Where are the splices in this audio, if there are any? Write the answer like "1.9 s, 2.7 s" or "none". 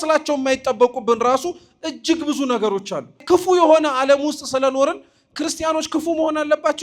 3.2 s